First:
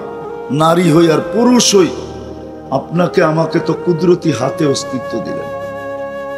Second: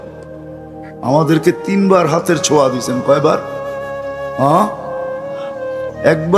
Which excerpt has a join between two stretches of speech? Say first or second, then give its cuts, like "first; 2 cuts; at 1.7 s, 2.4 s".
first; 1 cut; at 4.9 s